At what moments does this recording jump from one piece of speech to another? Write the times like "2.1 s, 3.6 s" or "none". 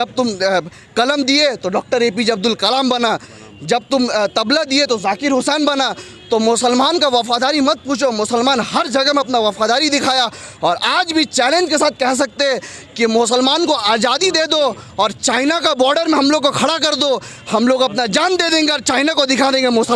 none